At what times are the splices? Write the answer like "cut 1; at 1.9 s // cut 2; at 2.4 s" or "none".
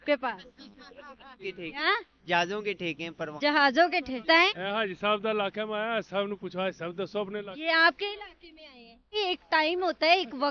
cut 1; at 9.2 s